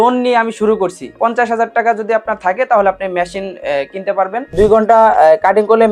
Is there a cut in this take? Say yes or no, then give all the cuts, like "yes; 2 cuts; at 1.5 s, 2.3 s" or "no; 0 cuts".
yes; 2 cuts; at 1.0 s, 4.5 s